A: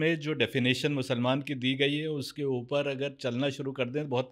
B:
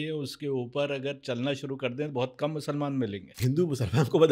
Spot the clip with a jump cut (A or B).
B